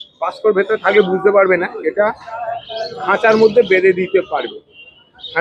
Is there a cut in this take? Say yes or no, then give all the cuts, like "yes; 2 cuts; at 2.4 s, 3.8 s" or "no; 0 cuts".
no; 0 cuts